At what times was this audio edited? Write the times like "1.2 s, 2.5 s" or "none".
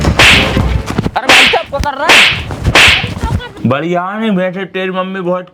3.5 s